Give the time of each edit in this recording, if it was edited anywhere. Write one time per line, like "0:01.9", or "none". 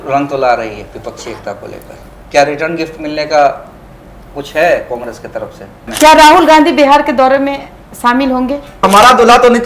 0:05.8
0:08.8